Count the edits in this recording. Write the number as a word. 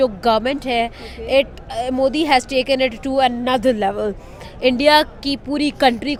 zero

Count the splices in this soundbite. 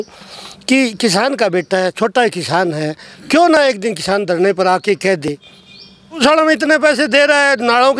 one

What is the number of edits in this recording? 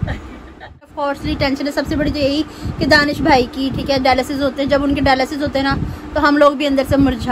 one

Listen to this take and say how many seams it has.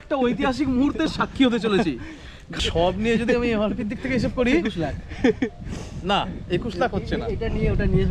one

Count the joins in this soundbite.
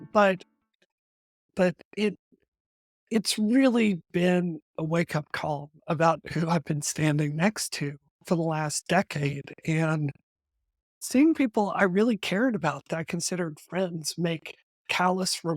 two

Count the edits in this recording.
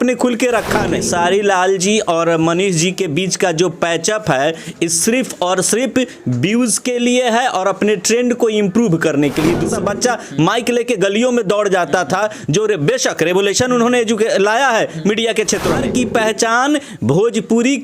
three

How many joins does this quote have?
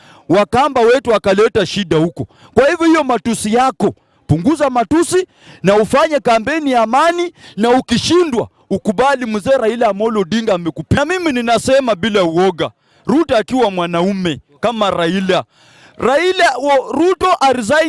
one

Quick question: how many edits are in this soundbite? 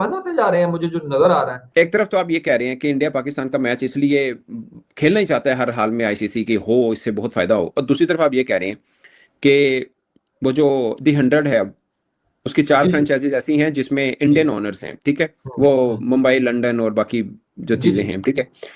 one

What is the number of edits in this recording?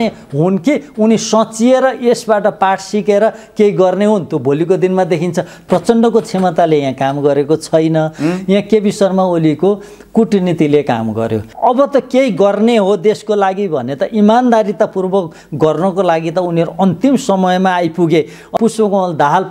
three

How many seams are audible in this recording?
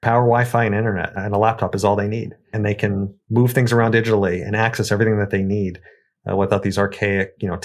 two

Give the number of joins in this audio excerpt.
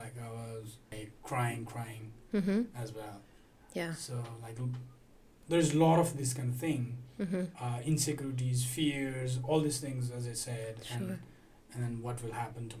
one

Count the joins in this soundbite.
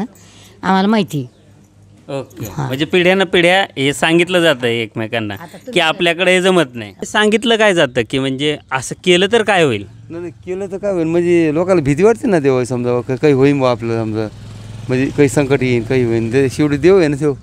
one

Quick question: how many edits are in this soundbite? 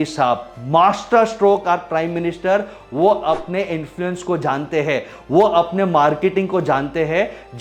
zero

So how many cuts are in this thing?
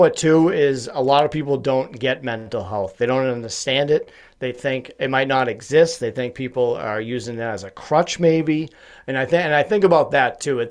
zero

